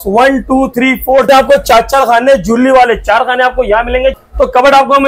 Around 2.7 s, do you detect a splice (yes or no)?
no